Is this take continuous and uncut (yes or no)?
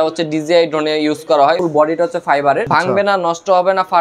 no